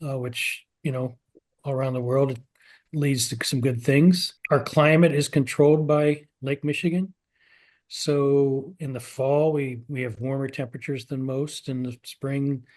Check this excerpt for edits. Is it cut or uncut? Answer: cut